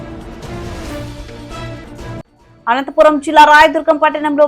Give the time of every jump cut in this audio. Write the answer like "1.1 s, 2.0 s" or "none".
2.2 s